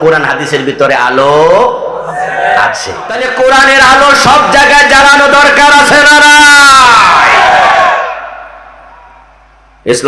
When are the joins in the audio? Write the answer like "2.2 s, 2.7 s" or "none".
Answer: 3.2 s